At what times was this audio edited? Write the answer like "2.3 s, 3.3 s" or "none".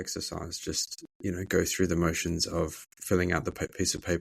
2.9 s